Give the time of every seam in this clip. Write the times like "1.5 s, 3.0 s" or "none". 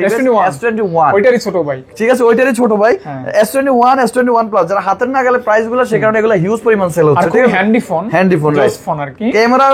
none